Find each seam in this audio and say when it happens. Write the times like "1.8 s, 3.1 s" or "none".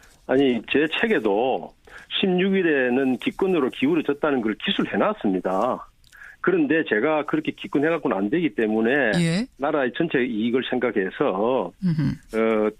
2.1 s